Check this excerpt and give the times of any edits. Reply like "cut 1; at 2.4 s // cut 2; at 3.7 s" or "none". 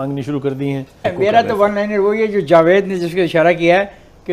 none